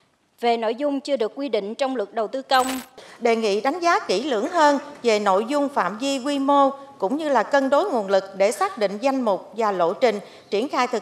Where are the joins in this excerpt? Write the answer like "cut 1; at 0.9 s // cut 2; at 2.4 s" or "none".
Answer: cut 1; at 2.9 s